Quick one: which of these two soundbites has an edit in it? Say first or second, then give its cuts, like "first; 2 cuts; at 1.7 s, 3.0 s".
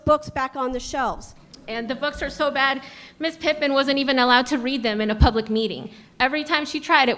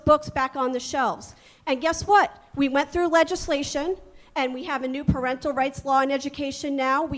first; 1 cut; at 1.6 s